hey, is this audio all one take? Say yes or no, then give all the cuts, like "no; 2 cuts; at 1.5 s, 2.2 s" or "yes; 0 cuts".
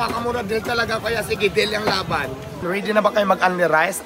no; 1 cut; at 2.6 s